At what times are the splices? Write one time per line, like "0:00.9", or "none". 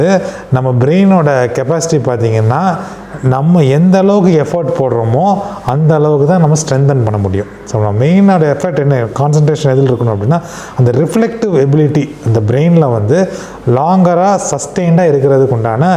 none